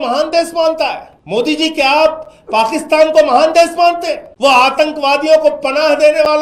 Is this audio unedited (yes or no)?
no